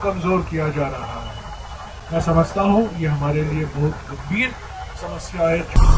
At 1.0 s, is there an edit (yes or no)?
no